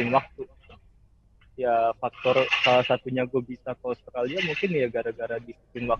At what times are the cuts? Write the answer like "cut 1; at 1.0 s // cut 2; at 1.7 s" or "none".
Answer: none